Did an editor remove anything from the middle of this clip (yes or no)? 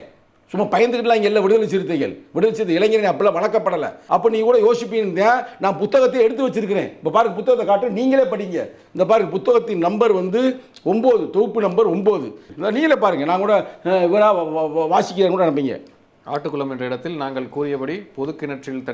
yes